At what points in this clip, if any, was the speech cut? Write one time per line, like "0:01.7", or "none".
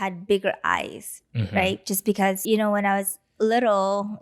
0:02.4